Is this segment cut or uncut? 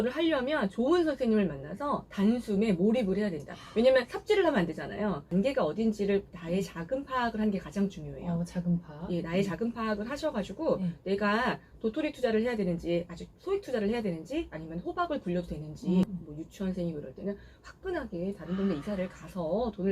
cut